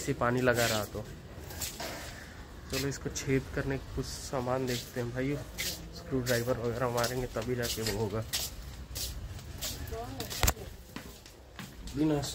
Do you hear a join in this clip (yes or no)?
no